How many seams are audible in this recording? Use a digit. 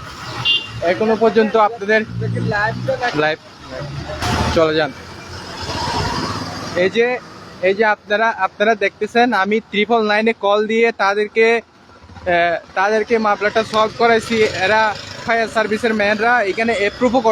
1